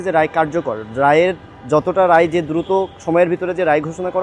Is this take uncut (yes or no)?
yes